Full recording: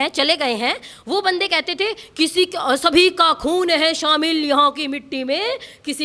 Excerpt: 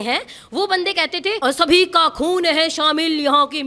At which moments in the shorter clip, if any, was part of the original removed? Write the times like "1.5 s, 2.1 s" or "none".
1.4 s